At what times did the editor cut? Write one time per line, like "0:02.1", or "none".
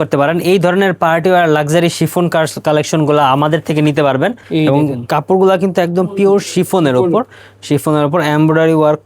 0:04.4